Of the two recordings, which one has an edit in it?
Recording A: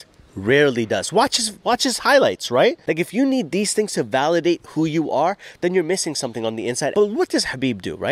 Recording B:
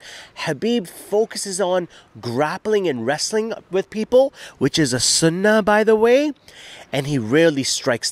A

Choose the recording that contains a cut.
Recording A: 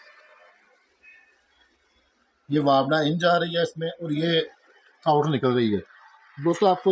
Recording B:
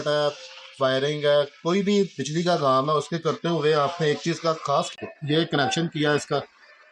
B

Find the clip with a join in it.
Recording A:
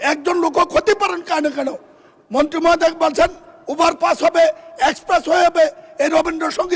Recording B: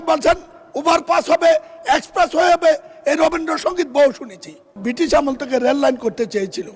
B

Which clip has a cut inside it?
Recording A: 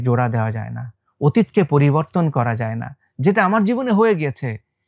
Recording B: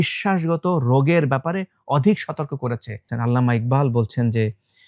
B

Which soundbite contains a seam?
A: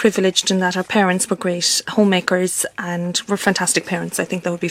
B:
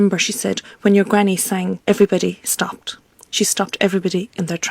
B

